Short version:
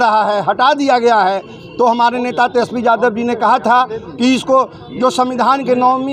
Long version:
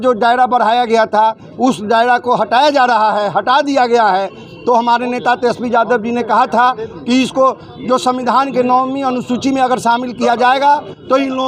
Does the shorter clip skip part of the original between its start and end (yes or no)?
no